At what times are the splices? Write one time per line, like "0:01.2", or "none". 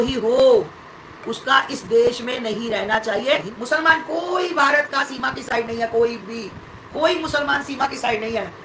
0:03.5